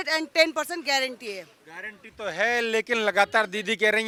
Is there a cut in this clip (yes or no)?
no